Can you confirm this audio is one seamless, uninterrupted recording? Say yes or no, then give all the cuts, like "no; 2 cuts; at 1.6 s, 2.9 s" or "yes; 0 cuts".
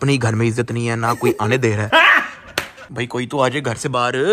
yes; 0 cuts